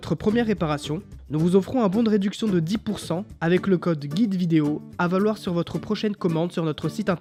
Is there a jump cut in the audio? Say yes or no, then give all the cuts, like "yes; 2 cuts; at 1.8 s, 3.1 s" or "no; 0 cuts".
no; 0 cuts